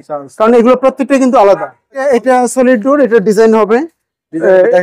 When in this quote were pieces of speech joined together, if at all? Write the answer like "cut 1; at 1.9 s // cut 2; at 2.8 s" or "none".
cut 1; at 2.0 s